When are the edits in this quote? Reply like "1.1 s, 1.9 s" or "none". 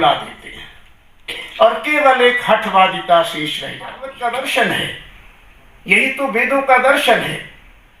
4.1 s